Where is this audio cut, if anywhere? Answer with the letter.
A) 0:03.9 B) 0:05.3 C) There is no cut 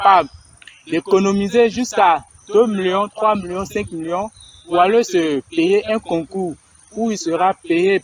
C